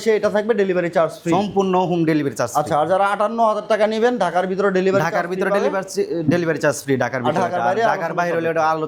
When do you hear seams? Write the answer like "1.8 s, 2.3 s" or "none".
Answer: none